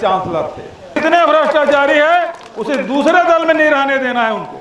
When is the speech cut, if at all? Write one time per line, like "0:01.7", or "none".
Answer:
0:01.0

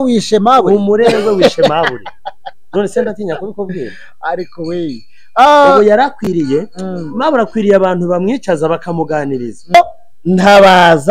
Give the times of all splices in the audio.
0:09.7

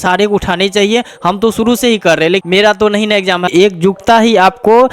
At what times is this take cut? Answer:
0:02.4
0:03.5

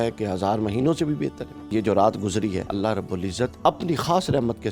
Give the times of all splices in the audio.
0:01.7
0:03.1

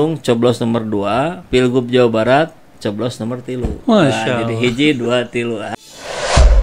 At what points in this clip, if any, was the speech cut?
0:01.4
0:05.7

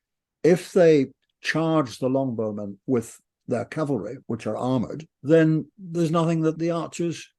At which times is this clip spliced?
0:04.1
0:05.1
0:05.8
0:06.6

